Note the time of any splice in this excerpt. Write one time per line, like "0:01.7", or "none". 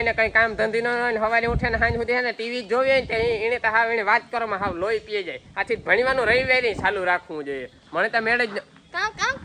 none